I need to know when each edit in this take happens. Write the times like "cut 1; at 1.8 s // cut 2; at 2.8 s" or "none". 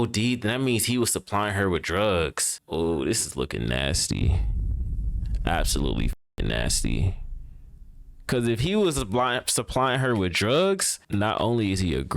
cut 1; at 2.5 s // cut 2; at 10.9 s